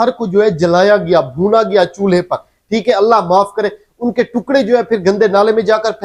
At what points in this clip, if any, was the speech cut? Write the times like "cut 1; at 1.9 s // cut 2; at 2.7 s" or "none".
none